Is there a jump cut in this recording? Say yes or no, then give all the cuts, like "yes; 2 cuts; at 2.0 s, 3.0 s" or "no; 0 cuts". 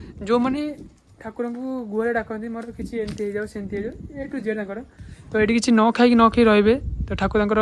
no; 0 cuts